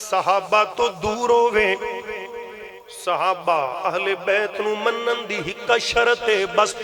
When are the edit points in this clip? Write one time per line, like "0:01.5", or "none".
none

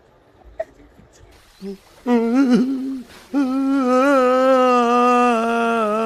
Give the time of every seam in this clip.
none

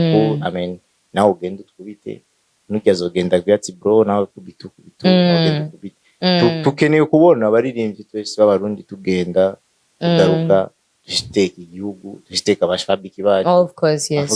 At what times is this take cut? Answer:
none

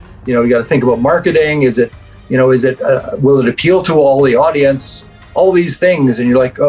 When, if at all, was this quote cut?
none

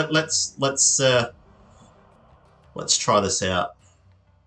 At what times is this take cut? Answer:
none

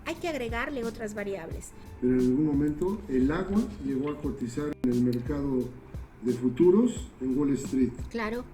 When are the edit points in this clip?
0:01.8

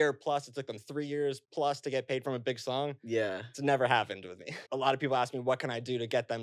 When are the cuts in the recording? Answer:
0:01.4
0:04.6

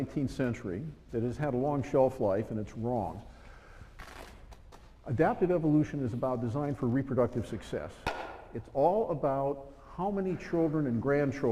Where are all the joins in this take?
0:02.7

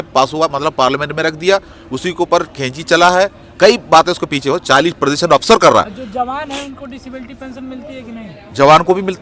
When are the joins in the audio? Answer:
none

